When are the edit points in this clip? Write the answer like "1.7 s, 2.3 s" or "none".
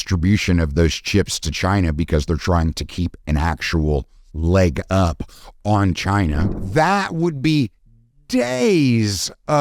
6.6 s